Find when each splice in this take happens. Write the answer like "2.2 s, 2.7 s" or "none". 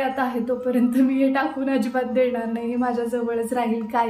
none